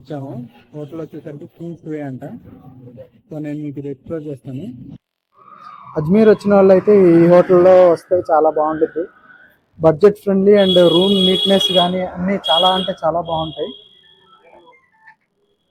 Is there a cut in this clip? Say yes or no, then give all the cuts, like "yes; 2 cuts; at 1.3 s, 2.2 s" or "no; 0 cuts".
no; 0 cuts